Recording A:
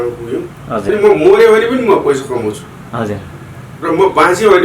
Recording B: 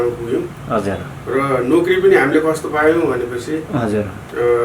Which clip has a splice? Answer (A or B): A